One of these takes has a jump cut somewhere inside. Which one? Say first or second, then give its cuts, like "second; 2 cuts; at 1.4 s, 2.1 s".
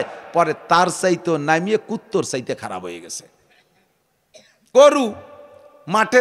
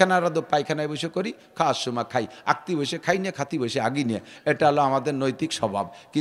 first; 1 cut; at 4.7 s